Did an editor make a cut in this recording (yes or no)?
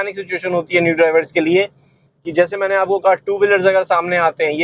no